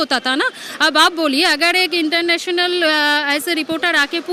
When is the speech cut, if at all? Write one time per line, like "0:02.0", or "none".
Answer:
none